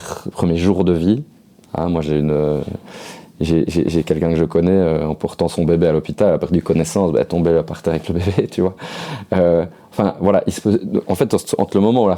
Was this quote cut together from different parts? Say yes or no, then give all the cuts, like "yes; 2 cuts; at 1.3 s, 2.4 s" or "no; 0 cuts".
no; 0 cuts